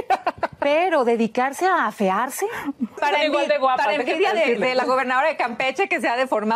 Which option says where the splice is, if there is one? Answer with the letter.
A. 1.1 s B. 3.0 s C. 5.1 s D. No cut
B